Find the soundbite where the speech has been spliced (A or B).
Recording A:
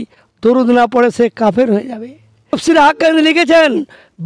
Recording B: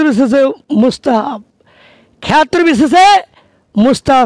A